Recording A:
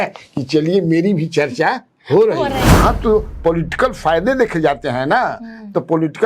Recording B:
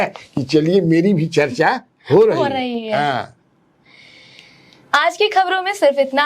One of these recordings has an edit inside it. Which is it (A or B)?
A